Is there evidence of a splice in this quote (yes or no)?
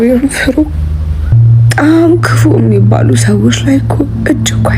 yes